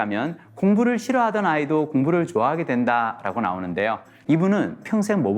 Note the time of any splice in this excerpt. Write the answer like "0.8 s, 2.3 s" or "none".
4.1 s

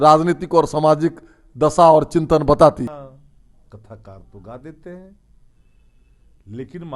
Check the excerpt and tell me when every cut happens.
2.9 s

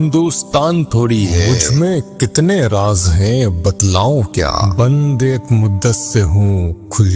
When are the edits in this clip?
1.5 s, 4.7 s

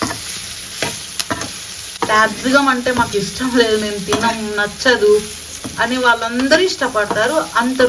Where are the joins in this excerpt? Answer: 1.8 s

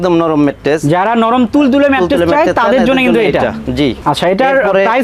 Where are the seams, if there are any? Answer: none

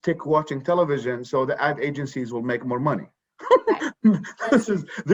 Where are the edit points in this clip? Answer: none

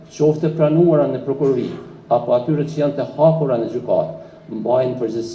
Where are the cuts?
none

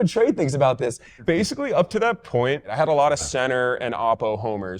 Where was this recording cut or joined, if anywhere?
1.1 s, 2.7 s

